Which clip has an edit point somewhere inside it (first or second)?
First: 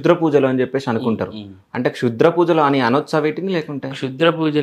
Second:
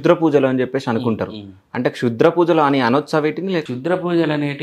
second